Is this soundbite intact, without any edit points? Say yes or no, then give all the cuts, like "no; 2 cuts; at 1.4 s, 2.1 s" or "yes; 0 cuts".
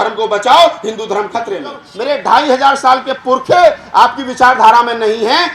no; 1 cut; at 1.9 s